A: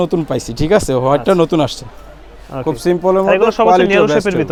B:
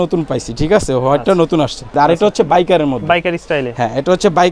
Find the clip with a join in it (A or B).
B